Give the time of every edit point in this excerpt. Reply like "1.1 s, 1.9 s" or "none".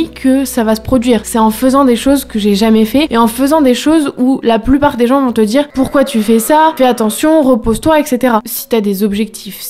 1.3 s, 3.1 s, 5.7 s, 6.7 s, 8.5 s